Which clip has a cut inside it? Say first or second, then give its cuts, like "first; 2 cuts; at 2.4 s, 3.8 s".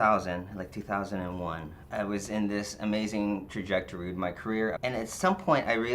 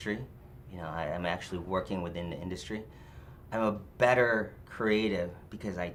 first; 2 cuts; at 1.7 s, 4.8 s